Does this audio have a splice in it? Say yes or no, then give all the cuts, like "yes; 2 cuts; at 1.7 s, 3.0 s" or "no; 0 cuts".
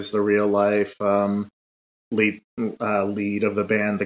no; 0 cuts